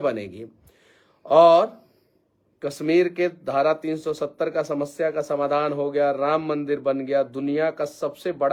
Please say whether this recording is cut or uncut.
uncut